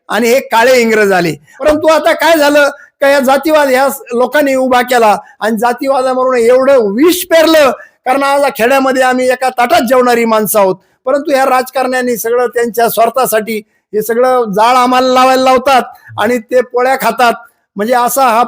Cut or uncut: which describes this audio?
cut